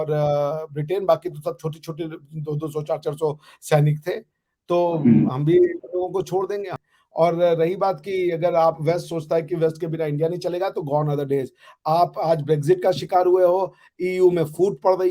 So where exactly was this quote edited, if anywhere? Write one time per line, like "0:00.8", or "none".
0:06.7